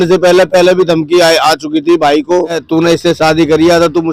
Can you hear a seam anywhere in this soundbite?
yes; 1 cut; at 2.6 s

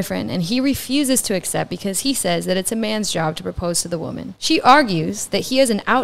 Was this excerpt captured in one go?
no; 1 cut; at 4.3 s

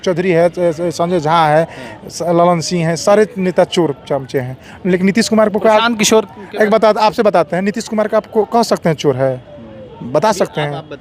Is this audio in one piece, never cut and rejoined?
yes; 0 cuts

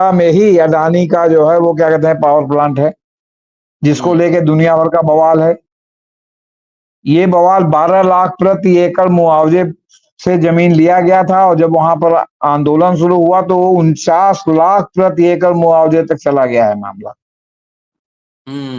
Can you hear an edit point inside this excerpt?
no; 0 cuts

